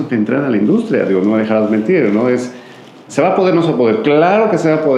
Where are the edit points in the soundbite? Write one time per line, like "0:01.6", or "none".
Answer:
none